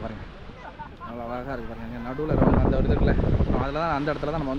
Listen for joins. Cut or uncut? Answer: uncut